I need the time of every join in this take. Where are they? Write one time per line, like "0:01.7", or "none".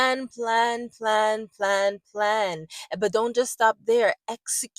none